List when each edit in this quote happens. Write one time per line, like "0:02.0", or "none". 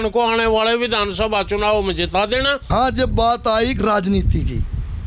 0:02.7